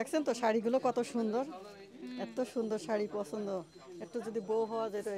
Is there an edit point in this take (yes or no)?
no